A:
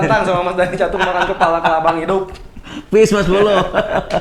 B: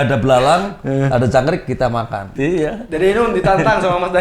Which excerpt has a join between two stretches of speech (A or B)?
B